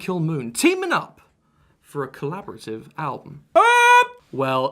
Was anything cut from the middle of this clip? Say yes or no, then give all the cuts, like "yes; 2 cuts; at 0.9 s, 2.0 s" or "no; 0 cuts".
yes; 1 cut; at 3.0 s